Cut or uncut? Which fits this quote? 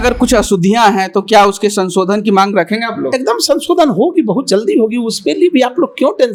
uncut